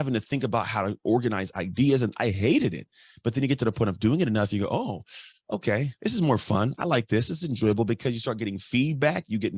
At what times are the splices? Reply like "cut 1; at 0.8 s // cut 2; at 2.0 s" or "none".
none